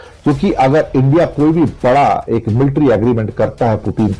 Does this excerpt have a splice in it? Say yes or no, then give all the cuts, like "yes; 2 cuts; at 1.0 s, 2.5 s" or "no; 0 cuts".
no; 0 cuts